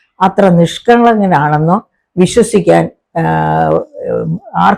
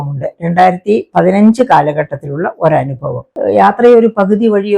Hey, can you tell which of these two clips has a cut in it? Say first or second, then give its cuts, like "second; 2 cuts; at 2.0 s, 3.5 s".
second; 1 cut; at 3.3 s